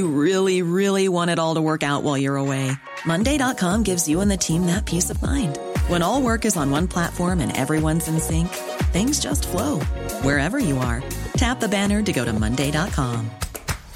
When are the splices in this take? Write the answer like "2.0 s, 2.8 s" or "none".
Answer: none